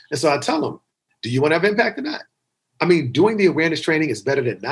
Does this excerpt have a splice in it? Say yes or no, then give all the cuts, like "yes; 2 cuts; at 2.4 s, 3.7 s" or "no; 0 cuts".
no; 0 cuts